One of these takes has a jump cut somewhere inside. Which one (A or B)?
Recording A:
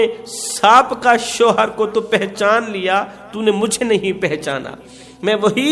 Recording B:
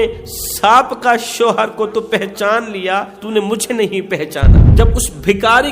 B